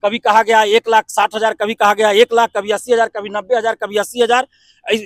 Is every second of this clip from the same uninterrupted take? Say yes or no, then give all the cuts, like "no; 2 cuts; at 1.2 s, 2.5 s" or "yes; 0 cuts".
yes; 0 cuts